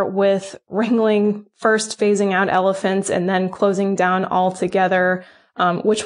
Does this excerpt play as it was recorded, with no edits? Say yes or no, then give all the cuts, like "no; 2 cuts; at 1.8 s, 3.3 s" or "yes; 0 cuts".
yes; 0 cuts